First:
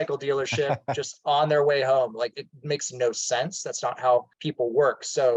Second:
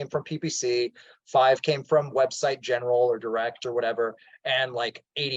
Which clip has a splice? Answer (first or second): first